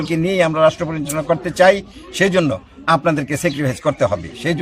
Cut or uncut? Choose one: uncut